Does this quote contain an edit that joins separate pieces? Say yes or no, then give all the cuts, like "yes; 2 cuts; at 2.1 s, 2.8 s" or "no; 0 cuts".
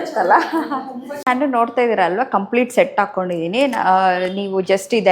yes; 1 cut; at 1.2 s